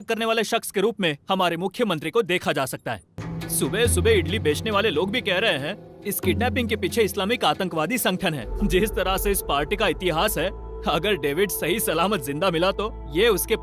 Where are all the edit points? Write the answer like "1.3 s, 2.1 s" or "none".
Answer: 3.2 s, 8.5 s